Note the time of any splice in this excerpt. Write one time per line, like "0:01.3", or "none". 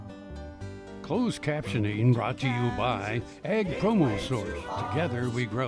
0:01.0